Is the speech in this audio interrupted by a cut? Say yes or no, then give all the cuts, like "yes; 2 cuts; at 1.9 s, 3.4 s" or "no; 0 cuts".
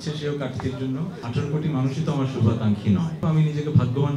yes; 2 cuts; at 1.3 s, 3.1 s